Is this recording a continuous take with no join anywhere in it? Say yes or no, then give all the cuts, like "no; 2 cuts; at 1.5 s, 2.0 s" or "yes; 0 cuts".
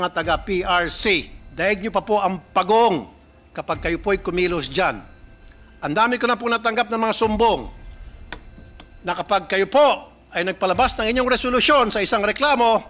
no; 1 cut; at 1.4 s